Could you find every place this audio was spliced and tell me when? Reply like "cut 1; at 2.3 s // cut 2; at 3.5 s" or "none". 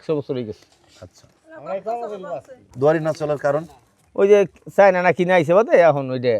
cut 1; at 2.7 s